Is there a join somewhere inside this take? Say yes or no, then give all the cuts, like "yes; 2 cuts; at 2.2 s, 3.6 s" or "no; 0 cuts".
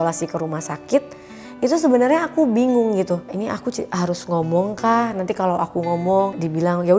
no; 0 cuts